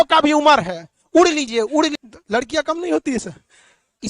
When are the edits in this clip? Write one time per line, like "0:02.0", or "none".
0:02.0